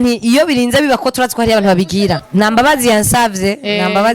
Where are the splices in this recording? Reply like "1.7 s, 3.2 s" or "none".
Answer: 2.2 s